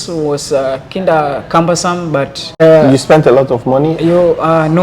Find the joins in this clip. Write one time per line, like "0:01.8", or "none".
0:02.6